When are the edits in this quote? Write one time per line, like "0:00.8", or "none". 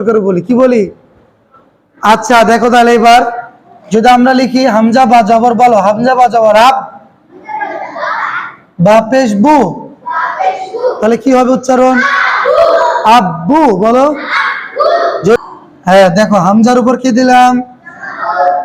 0:15.4